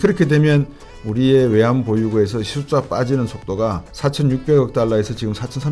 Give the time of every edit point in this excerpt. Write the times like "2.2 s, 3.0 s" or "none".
3.9 s